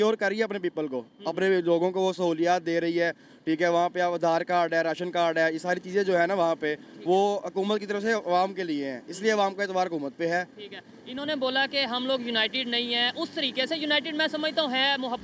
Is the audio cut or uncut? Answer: uncut